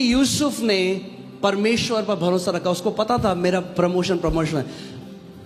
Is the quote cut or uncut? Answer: uncut